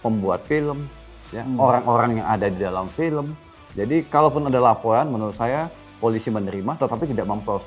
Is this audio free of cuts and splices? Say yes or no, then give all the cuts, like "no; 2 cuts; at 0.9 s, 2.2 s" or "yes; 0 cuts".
yes; 0 cuts